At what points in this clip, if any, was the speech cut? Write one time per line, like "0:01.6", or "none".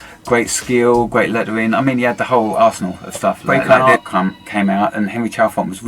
0:03.5